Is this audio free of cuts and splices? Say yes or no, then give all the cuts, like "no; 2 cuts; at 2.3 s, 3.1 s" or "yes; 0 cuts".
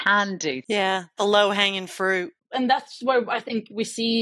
no; 1 cut; at 2.3 s